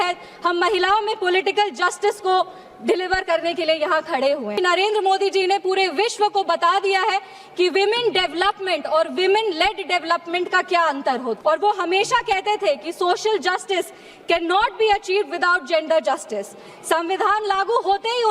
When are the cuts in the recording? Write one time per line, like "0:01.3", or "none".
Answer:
0:04.6
0:11.4